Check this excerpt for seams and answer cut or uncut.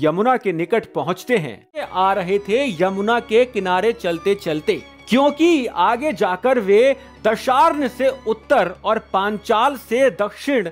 cut